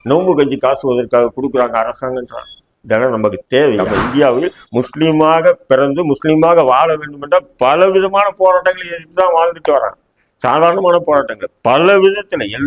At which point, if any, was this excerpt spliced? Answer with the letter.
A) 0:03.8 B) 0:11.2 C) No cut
A